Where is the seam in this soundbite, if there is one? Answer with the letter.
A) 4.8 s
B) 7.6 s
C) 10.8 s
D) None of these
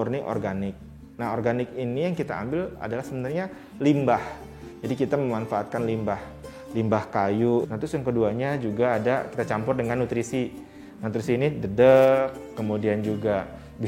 B